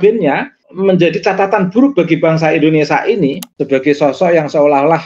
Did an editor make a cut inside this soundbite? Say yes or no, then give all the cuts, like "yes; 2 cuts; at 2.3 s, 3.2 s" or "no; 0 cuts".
yes; 1 cut; at 3.5 s